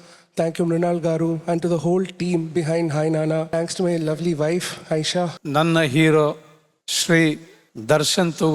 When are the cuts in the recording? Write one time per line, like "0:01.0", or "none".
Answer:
0:03.5
0:05.4